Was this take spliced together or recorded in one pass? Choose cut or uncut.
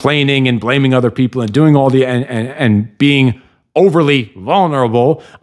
uncut